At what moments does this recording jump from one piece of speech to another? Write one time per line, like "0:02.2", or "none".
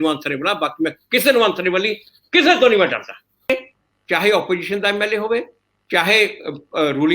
0:03.5